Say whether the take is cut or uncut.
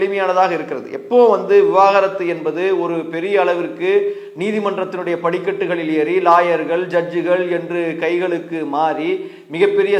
uncut